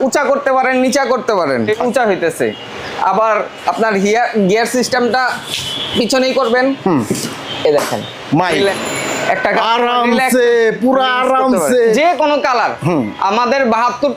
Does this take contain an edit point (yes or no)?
yes